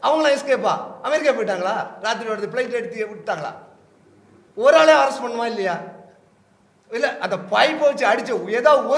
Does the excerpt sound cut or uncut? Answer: uncut